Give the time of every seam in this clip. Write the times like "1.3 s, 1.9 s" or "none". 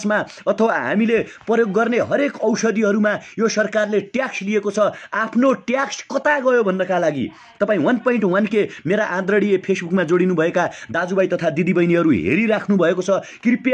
none

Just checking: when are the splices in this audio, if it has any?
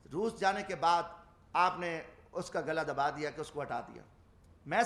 none

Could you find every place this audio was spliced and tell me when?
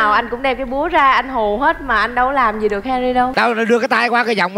3.3 s

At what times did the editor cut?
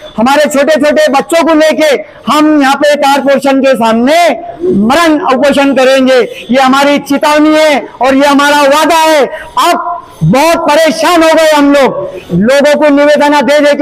none

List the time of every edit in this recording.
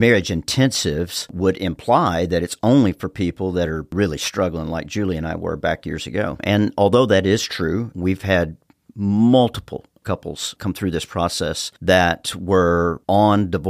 3.9 s, 9.9 s, 11.7 s

